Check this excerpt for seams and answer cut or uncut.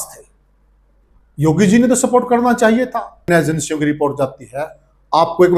cut